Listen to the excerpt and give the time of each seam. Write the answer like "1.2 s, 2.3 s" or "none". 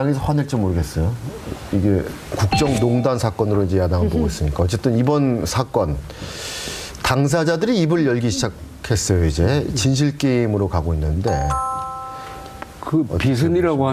none